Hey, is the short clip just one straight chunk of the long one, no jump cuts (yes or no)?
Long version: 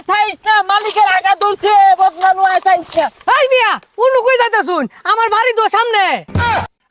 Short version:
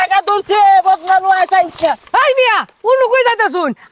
yes